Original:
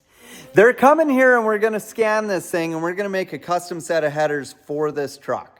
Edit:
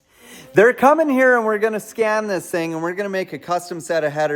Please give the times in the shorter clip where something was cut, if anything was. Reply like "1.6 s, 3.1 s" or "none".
none

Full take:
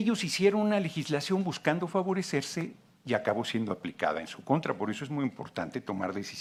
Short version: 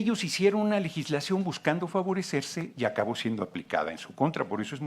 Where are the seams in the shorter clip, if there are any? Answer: 2.6 s

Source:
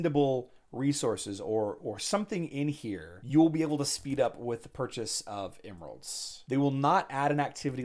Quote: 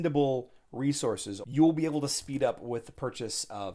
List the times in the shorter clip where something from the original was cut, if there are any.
1.3 s

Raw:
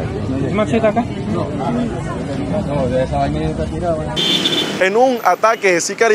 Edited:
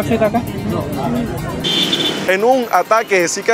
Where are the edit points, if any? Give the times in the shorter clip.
1.6 s

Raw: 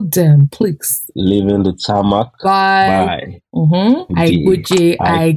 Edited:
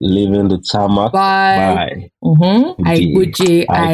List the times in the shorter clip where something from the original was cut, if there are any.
1.1 s

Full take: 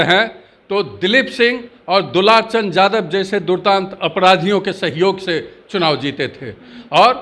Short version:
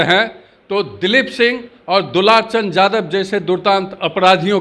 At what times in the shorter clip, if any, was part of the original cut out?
none

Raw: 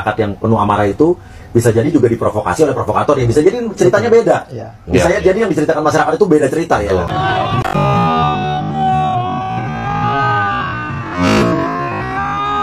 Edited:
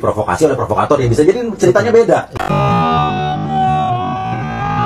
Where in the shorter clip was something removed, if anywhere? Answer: 2.4 s

